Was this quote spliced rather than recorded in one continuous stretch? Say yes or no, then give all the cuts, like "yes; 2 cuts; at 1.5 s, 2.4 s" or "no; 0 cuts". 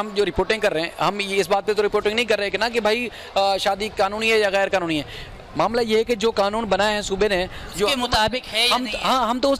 no; 0 cuts